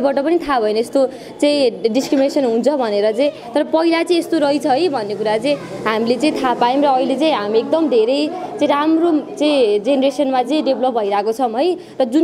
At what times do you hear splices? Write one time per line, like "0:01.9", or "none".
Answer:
none